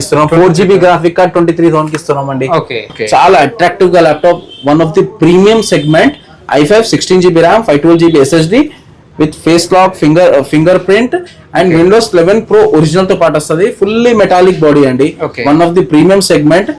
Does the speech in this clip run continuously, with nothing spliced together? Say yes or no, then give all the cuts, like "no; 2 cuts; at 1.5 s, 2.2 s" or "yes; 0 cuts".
no; 1 cut; at 2.9 s